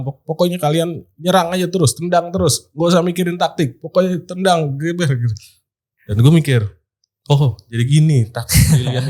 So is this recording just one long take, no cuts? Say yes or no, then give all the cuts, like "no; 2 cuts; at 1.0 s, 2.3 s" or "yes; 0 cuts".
yes; 0 cuts